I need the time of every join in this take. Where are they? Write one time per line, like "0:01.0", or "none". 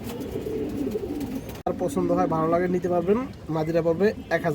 0:01.7